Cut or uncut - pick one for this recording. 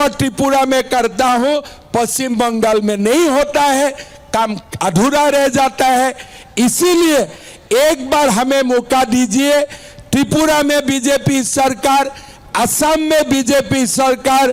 uncut